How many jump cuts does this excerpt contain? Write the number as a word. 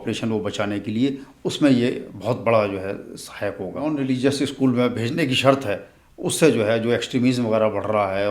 one